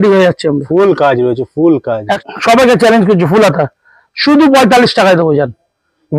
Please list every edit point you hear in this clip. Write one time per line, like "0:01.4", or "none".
0:02.2